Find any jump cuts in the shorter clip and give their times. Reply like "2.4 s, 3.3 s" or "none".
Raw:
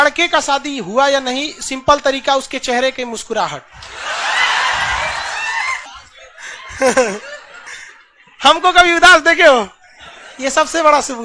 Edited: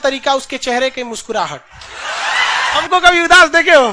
2.8 s